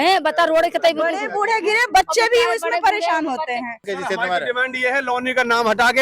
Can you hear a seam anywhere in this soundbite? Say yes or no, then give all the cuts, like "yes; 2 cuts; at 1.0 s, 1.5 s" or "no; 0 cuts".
yes; 1 cut; at 3.9 s